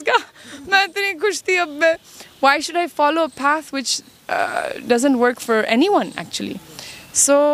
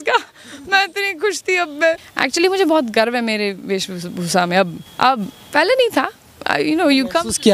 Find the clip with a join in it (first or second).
second